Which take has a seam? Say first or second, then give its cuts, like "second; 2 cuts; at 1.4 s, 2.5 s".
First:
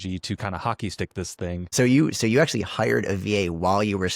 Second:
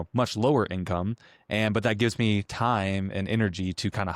first; 1 cut; at 1.7 s